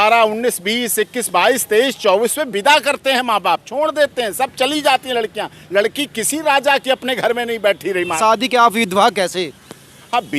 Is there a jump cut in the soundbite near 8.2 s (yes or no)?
yes